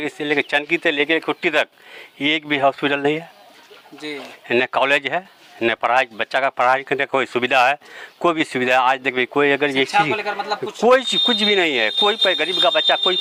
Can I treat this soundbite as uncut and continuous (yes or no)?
yes